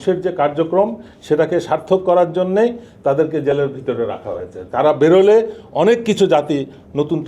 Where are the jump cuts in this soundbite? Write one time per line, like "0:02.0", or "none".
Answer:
none